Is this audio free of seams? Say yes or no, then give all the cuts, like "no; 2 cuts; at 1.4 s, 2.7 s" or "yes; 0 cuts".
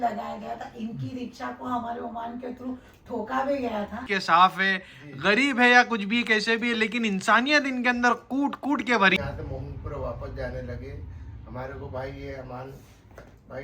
no; 2 cuts; at 4.1 s, 9.2 s